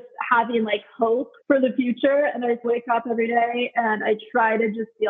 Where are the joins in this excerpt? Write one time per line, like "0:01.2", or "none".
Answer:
0:01.3
0:02.6